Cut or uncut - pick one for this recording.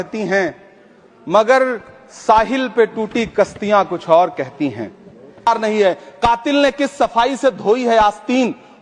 cut